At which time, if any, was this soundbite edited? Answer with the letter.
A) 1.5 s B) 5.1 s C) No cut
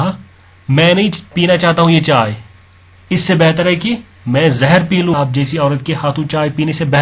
B